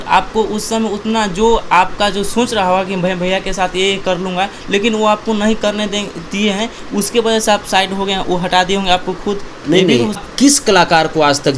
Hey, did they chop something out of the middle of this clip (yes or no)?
yes